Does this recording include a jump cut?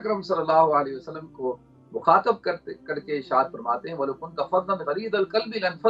no; 0 cuts

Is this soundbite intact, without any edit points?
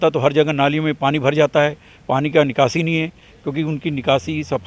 yes; 0 cuts

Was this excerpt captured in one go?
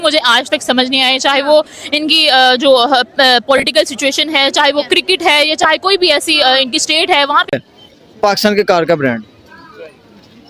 no; 1 cut; at 7.6 s

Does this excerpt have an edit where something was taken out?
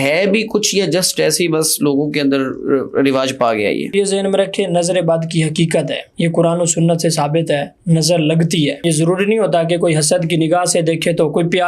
yes; 3 cuts; at 3.9 s, 6.0 s, 8.8 s

